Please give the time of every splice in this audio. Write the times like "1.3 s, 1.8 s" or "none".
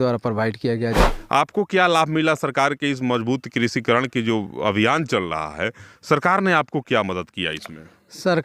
1.1 s